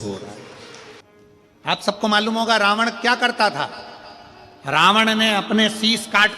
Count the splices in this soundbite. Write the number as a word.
one